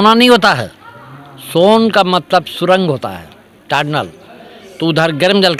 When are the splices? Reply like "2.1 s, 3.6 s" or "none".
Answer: none